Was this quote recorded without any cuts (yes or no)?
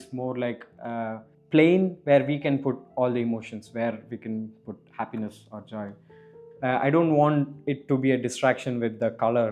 no